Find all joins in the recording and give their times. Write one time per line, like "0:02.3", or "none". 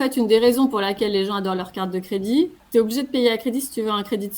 0:02.6